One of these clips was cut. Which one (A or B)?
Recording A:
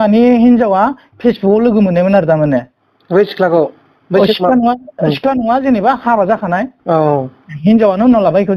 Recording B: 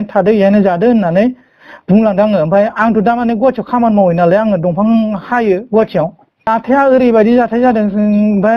B